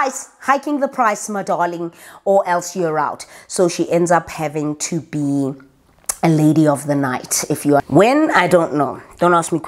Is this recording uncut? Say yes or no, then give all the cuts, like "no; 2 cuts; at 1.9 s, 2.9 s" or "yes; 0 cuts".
no; 1 cut; at 7.8 s